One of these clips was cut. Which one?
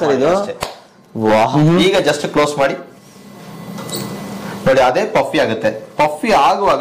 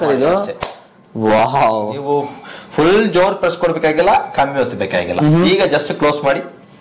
first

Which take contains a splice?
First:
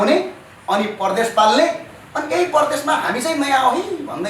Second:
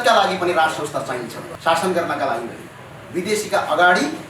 second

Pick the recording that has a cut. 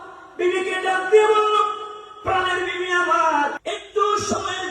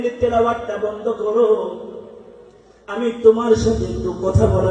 first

